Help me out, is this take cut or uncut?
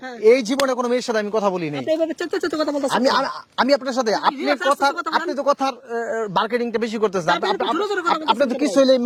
uncut